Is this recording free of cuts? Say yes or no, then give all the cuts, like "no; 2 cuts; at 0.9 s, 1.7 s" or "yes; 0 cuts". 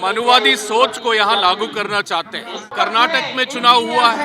no; 1 cut; at 2.7 s